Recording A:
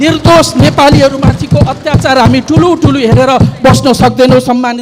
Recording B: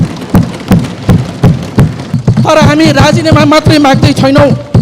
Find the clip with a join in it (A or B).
B